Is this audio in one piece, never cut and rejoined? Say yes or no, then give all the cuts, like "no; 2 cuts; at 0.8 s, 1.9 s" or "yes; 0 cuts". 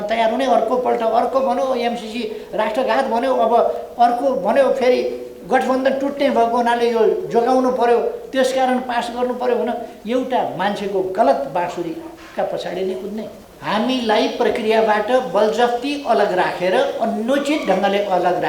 no; 2 cuts; at 9.9 s, 13.4 s